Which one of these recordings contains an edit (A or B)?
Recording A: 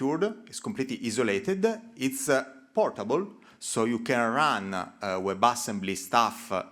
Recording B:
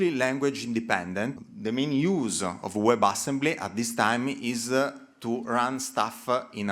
B